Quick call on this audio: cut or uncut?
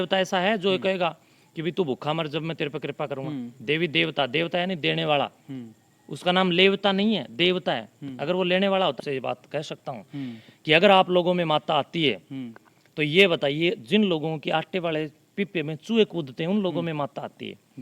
cut